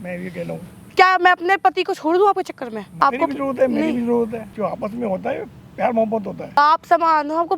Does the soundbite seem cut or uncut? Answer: cut